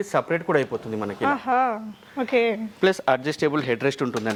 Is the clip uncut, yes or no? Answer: yes